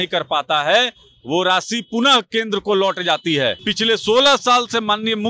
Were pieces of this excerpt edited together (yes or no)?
yes